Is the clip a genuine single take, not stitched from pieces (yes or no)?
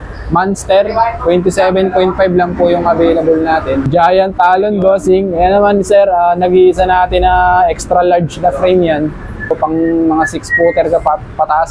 no